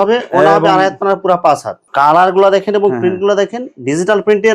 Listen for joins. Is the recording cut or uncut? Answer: cut